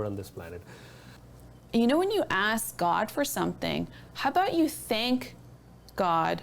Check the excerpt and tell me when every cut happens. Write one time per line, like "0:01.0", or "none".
0:01.1